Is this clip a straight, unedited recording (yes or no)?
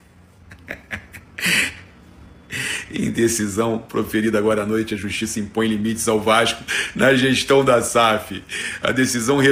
yes